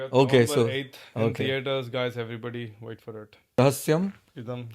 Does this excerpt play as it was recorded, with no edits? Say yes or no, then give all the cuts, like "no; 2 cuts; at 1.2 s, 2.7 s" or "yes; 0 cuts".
no; 1 cut; at 3.6 s